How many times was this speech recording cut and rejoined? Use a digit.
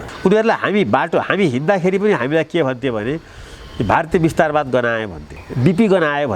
1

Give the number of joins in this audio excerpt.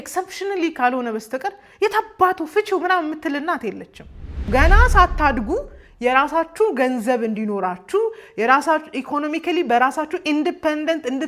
1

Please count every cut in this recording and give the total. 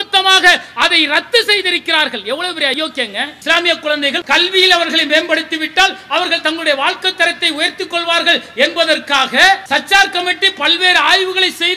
3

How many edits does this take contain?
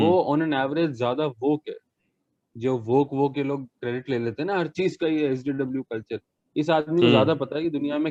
0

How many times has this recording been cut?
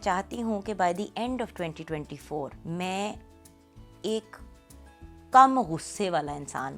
1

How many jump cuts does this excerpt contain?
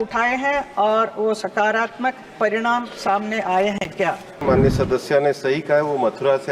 1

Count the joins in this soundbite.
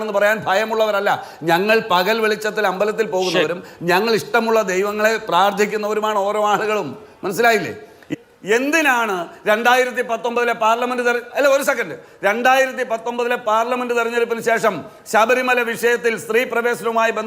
1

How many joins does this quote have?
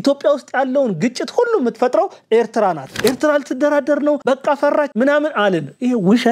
1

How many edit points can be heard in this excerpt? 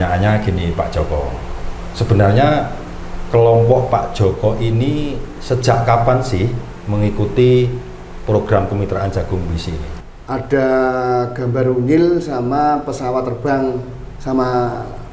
1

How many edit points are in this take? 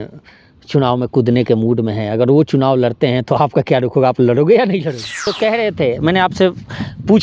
1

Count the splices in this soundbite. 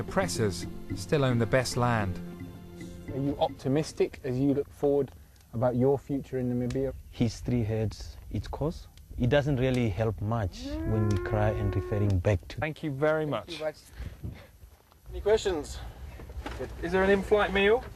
0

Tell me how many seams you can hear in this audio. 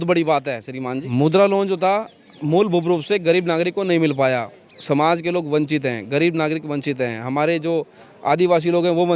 1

